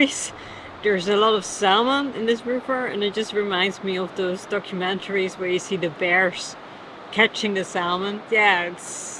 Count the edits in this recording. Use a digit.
1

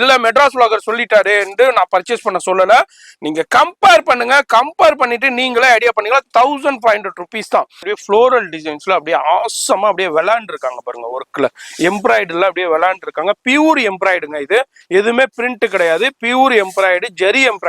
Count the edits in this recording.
1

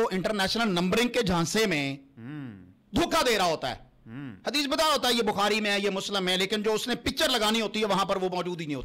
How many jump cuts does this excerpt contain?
0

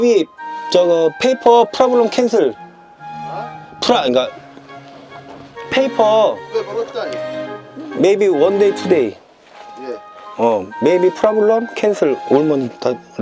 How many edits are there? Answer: 0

